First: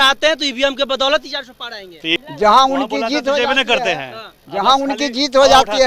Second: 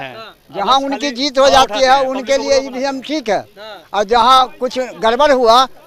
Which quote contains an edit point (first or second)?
first